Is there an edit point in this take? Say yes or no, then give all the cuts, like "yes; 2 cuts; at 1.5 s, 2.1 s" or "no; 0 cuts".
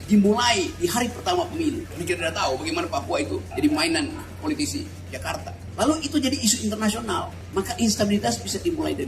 yes; 4 cuts; at 1.9 s, 3.5 s, 5.6 s, 7.4 s